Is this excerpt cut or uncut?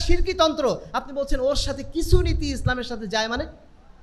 uncut